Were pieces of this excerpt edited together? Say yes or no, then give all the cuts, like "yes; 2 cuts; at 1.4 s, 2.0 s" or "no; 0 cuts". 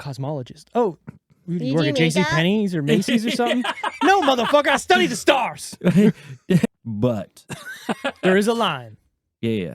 yes; 1 cut; at 6.7 s